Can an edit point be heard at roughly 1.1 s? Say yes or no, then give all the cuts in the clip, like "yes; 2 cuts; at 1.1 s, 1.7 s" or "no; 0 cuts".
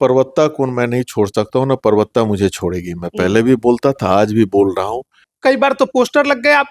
no; 1 cut; at 5.3 s